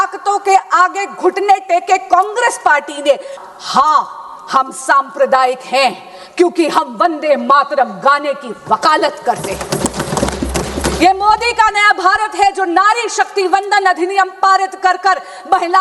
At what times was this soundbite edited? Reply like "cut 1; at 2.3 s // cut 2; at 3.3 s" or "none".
cut 1; at 3.3 s // cut 2; at 10.3 s